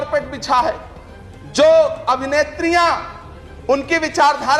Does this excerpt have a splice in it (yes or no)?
no